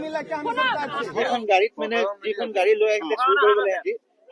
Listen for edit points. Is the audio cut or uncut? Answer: cut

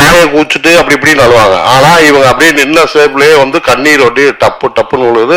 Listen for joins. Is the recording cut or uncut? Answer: uncut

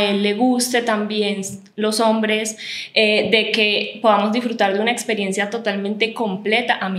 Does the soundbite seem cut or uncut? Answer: uncut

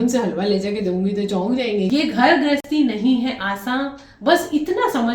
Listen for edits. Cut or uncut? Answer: cut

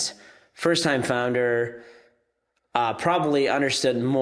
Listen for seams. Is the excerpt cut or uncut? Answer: uncut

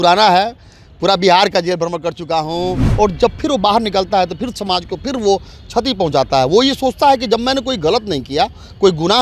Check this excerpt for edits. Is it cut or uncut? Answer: cut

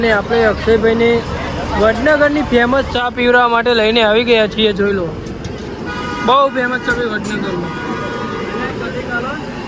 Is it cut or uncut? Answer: uncut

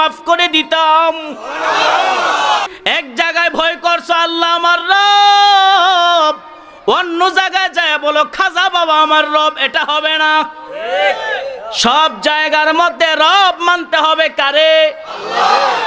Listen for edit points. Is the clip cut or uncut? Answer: cut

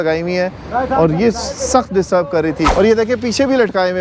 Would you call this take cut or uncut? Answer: cut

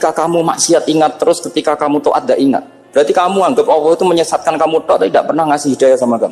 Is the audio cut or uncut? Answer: uncut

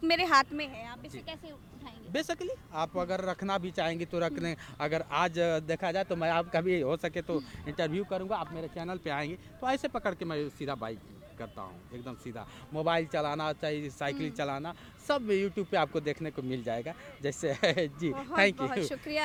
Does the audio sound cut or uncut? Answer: uncut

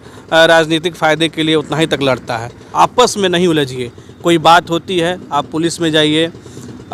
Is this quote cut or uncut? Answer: cut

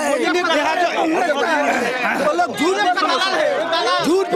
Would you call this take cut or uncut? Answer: uncut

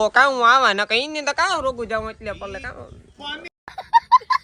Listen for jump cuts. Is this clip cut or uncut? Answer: cut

